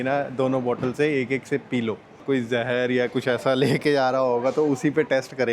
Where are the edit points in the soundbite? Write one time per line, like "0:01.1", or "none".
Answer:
0:02.1